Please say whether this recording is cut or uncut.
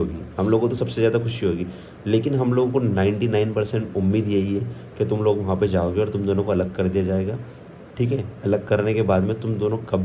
uncut